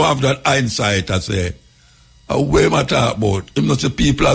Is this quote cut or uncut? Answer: uncut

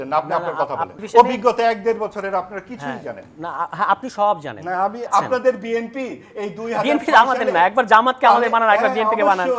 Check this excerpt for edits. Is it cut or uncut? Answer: cut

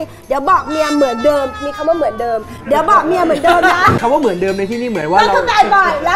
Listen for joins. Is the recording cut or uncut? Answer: cut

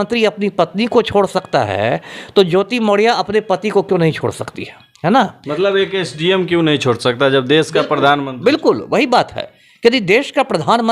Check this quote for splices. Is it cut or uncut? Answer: uncut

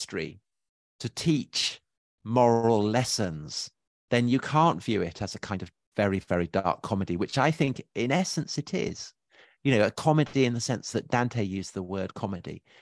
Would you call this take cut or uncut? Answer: uncut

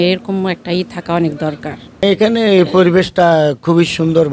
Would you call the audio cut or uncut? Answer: cut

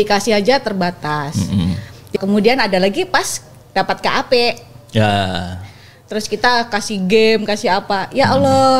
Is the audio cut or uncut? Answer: cut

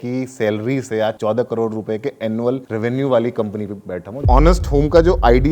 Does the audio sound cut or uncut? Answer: cut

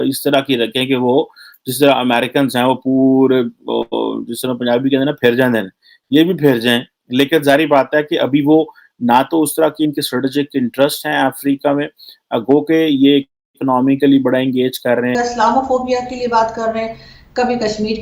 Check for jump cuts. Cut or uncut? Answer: cut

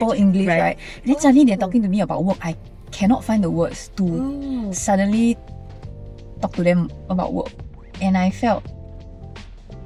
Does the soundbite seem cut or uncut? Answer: uncut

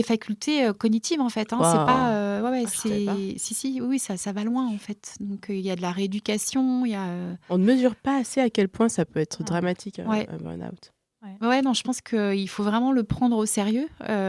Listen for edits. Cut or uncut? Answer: uncut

